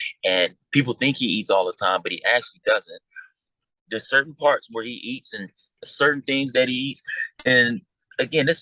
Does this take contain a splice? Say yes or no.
no